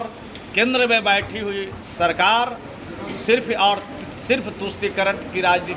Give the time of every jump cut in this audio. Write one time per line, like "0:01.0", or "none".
none